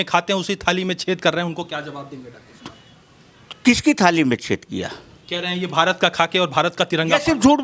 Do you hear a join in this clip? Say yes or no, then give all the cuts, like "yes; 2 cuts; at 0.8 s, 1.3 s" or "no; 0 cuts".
no; 0 cuts